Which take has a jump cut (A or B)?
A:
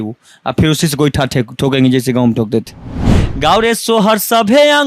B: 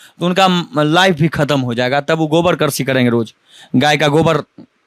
A